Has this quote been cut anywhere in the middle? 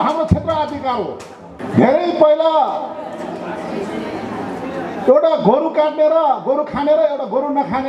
yes; 1 cut; at 1.6 s

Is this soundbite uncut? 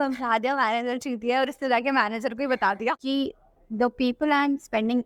no; 1 cut; at 3.0 s

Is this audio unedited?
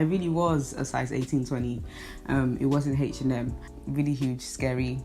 no; 1 cut; at 3.8 s

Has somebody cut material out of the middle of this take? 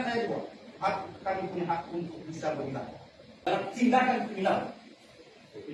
no; 0 cuts

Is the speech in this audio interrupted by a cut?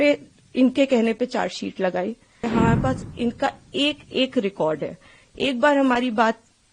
yes; 1 cut; at 2.4 s

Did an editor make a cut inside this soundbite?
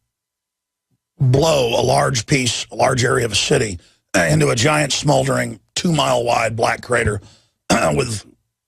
yes; 1 cut; at 4.6 s

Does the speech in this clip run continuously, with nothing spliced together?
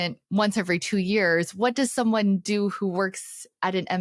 yes; 0 cuts

